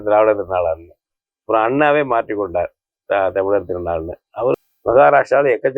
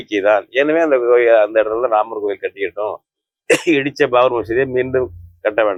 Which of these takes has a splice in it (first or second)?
first